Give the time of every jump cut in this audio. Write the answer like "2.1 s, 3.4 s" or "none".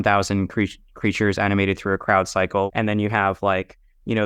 2.7 s